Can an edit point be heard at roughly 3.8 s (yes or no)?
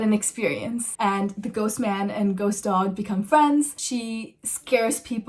yes